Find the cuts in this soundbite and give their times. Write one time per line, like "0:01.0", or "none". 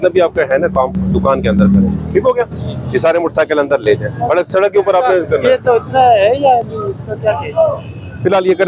none